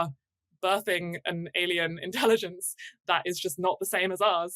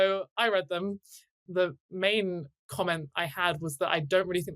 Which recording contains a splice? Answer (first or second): second